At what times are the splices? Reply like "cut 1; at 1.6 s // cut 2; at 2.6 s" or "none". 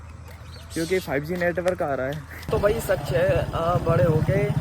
cut 1; at 2.5 s